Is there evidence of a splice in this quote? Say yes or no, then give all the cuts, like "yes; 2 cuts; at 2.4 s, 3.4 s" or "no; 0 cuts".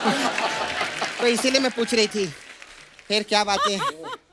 no; 0 cuts